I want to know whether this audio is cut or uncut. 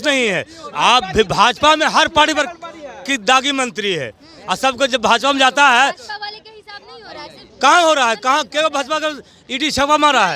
uncut